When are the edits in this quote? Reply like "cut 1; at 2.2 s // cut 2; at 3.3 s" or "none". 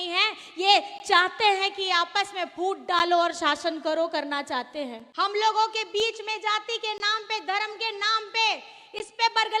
cut 1; at 5.0 s